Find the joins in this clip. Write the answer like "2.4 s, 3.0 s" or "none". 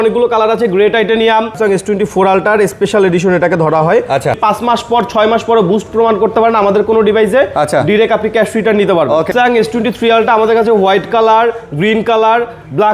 1.6 s, 4.3 s, 9.3 s